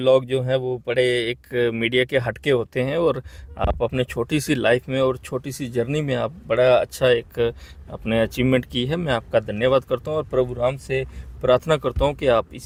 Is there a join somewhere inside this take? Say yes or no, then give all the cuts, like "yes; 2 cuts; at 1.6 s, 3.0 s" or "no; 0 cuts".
no; 0 cuts